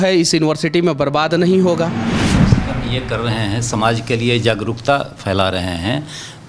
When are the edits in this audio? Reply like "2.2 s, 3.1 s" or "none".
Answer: 2.1 s